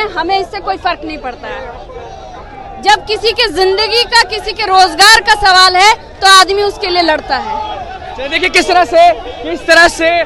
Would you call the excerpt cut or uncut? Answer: uncut